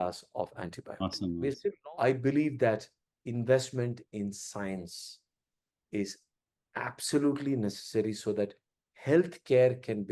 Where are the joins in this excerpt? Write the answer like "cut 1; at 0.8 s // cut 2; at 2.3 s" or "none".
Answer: cut 1; at 1.6 s